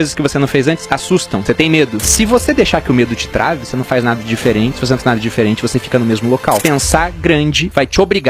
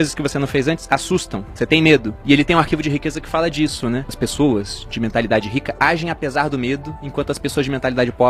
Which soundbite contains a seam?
first; 2 cuts; at 1.6 s, 6.6 s

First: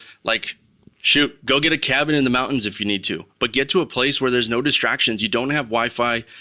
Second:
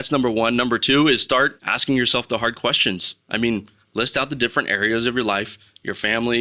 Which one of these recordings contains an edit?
second; 1 cut; at 1.7 s

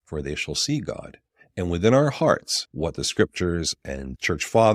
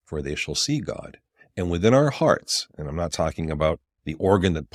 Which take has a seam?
first; 1 cut; at 2.6 s

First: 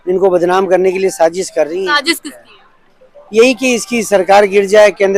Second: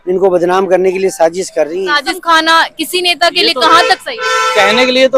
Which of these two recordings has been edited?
second; 1 cut; at 2.2 s

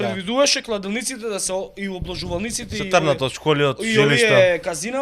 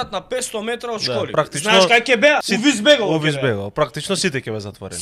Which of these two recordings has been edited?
second; 2 cuts; at 1.3 s, 2.5 s

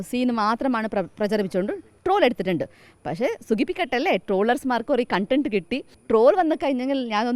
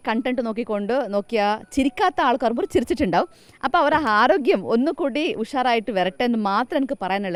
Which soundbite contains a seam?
first; 1 cut; at 5.9 s

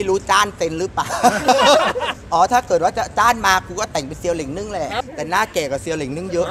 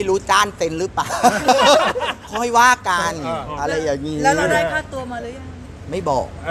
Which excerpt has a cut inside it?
first; 2 cuts; at 2.1 s, 4.9 s

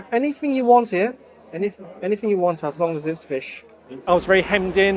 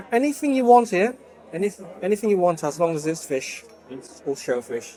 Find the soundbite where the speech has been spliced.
first; 1 cut; at 4.0 s

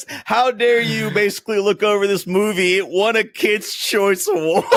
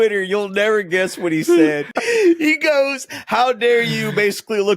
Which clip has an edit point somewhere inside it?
second; 1 cut; at 1.9 s

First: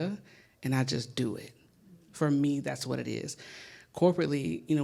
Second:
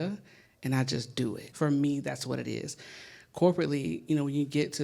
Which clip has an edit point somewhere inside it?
second; 1 cut; at 1.5 s

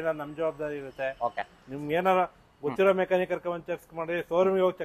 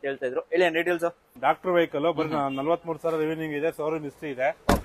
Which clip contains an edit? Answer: second; 1 cut; at 1.3 s

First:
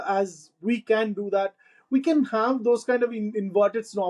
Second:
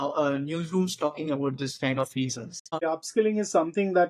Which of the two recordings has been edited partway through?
second; 1 cut; at 2.8 s

